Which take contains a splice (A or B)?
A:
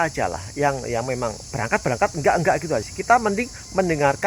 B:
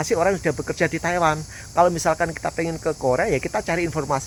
A